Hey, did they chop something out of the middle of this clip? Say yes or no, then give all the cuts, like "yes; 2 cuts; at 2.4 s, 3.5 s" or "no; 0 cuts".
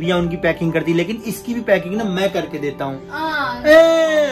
no; 0 cuts